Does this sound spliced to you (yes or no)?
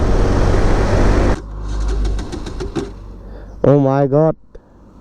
yes